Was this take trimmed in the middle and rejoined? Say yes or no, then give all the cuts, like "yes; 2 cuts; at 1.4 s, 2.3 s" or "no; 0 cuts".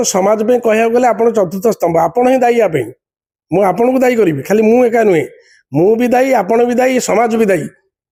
no; 0 cuts